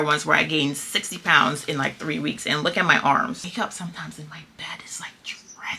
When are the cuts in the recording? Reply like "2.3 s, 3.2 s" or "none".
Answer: 3.4 s